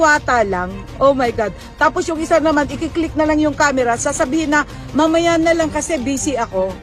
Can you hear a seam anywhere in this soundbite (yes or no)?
no